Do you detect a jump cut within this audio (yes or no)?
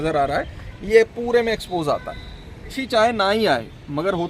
yes